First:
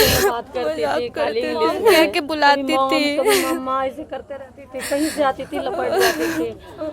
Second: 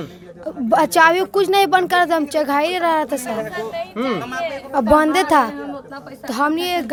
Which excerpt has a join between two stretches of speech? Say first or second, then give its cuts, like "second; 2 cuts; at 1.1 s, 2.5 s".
first; 1 cut; at 2.1 s